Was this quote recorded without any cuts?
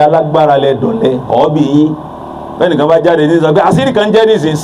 yes; 0 cuts

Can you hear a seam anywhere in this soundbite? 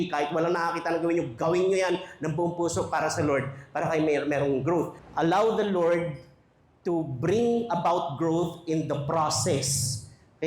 yes; 1 cut; at 5.0 s

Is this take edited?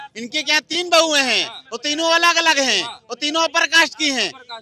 no; 0 cuts

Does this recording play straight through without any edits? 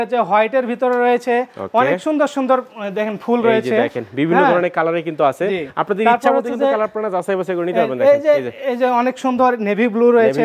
yes; 0 cuts

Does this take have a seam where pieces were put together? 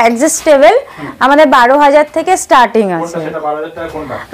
no; 0 cuts

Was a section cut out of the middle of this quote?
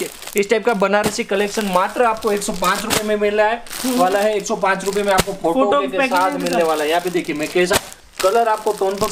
no; 0 cuts

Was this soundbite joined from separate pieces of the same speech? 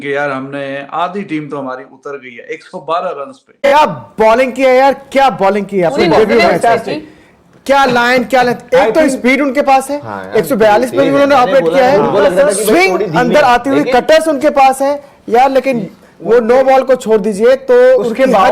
yes; 1 cut; at 3.7 s

